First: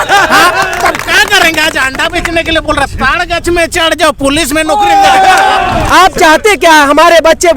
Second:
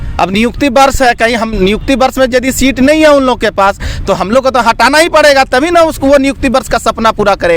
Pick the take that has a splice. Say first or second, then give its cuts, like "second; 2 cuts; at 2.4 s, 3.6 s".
first; 1 cut; at 5.7 s